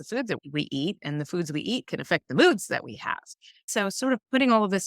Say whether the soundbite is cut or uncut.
cut